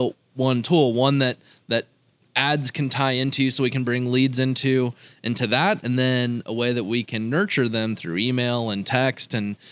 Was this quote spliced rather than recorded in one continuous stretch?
no; 0 cuts

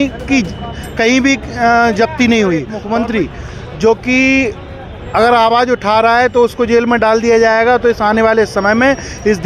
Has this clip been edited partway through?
yes; 1 cut; at 2.8 s

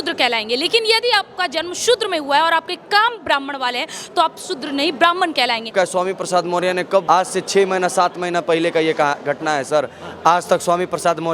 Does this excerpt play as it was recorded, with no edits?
no; 2 cuts; at 5.7 s, 7.0 s

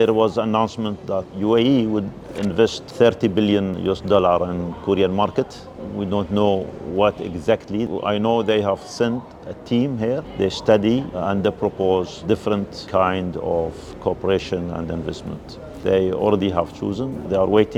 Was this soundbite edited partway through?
no; 0 cuts

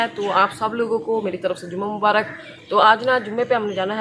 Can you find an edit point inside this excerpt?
no; 0 cuts

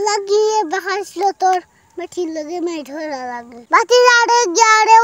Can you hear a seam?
yes; 1 cut; at 3.5 s

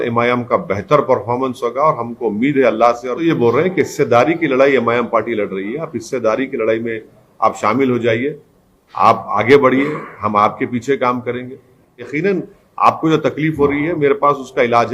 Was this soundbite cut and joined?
yes; 2 cuts; at 3.2 s, 12.1 s

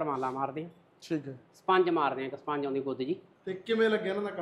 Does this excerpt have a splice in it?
yes; 1 cut; at 3.3 s

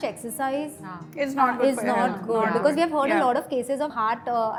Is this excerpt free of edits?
yes; 0 cuts

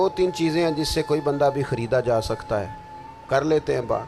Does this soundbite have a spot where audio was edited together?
no; 0 cuts

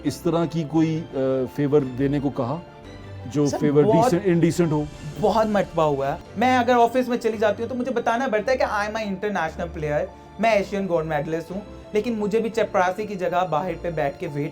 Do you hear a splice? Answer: yes; 1 cut; at 6.2 s

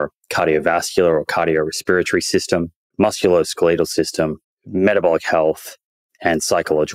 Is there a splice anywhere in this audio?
no; 0 cuts

